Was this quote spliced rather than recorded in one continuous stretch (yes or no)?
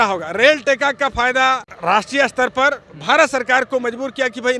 no